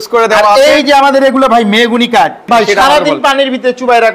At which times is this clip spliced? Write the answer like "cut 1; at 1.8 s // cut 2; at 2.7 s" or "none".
cut 1; at 2.4 s